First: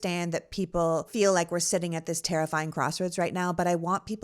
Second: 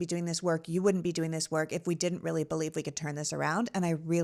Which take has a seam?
first; 1 cut; at 1.1 s

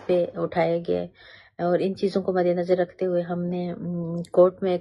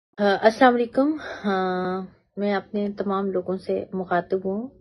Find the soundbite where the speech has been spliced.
second; 1 cut; at 0.9 s

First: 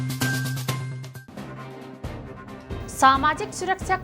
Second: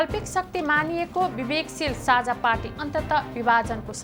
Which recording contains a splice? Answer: first; 1 cut; at 1.0 s

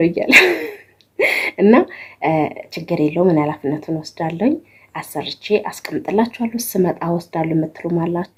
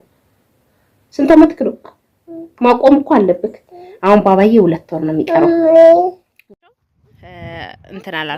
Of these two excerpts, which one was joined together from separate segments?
second; 1 cut; at 6.3 s

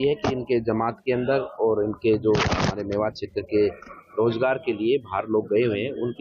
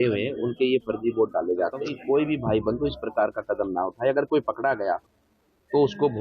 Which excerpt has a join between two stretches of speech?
second; 1 cut; at 1.9 s

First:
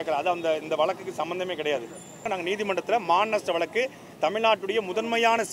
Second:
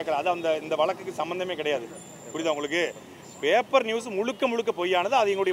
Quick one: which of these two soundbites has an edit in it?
first; 1 cut; at 2.3 s

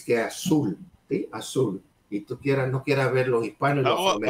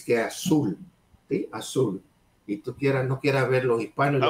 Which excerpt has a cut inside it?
first; 2 cuts; at 0.9 s, 1.9 s

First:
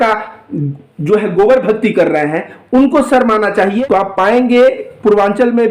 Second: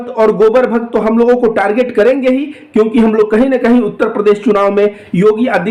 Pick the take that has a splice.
first; 1 cut; at 3.8 s

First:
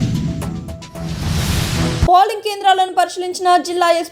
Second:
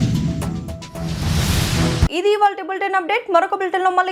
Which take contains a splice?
first; 1 cut; at 2.1 s

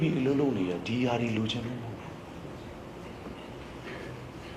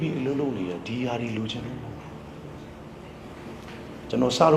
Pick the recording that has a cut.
second; 1 cut; at 3.2 s

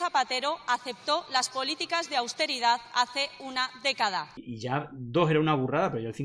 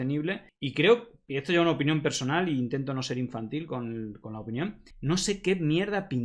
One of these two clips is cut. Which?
first; 1 cut; at 4.4 s

